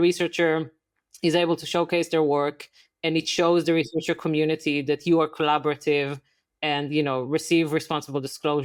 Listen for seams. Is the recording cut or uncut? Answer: uncut